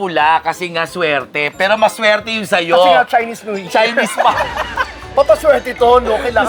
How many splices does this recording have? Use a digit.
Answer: 0